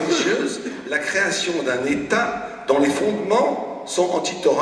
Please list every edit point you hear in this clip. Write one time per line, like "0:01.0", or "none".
none